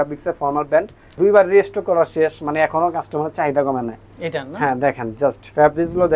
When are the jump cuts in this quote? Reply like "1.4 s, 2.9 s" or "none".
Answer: 1.1 s